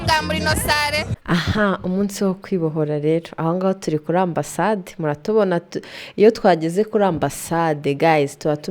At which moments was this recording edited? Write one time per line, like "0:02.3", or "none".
0:01.2

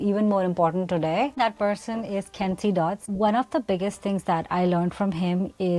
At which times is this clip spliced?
0:01.4
0:03.1

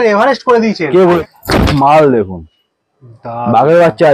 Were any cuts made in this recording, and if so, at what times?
0:01.0

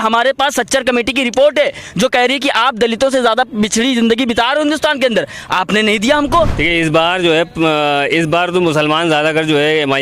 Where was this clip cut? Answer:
0:06.6

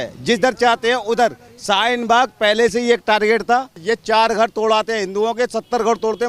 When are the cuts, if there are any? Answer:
0:03.8

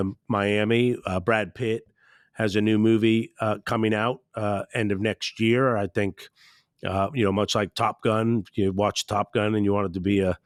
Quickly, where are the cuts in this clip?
none

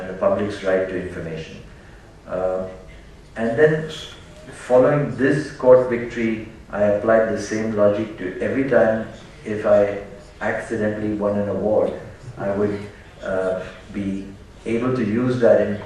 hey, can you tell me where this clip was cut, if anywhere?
0:14.1

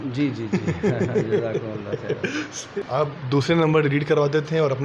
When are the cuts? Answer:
0:02.9

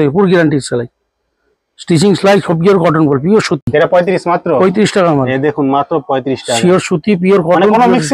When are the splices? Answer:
0:03.7

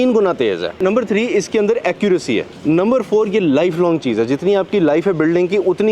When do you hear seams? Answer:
0:00.8
0:02.5

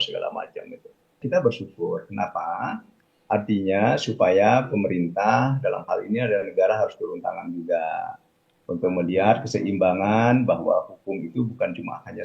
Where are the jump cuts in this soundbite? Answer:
0:01.2

